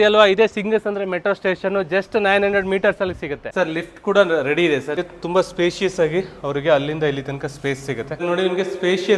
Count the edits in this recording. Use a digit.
3